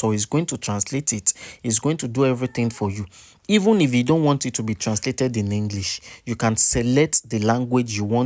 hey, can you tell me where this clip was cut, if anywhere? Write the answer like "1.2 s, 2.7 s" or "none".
none